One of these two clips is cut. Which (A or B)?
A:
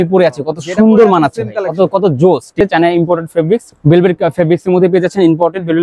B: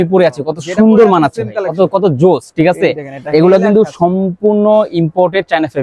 A